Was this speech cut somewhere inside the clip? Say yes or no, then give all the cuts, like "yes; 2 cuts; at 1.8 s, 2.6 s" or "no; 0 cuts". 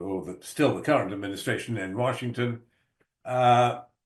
no; 0 cuts